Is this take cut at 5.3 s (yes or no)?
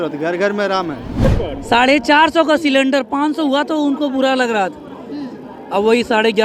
no